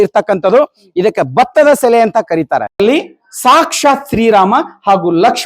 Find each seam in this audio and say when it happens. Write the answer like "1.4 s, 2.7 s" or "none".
2.8 s